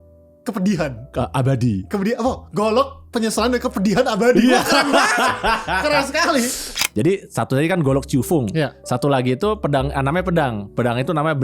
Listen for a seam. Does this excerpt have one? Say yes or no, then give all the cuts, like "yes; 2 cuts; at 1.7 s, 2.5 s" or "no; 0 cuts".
yes; 1 cut; at 6.7 s